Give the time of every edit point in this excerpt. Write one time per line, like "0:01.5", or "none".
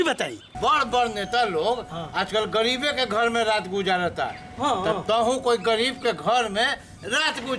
none

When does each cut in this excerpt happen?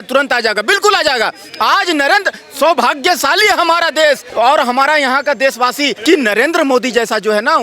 0:04.3
0:05.9

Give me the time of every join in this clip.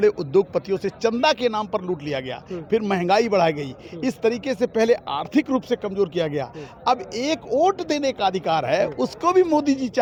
none

